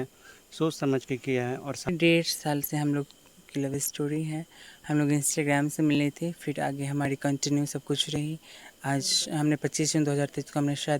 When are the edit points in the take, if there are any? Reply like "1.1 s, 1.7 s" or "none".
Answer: 1.9 s